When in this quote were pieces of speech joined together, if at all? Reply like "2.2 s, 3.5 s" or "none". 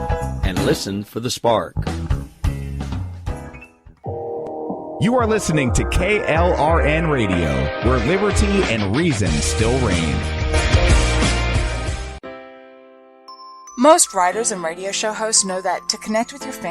12.2 s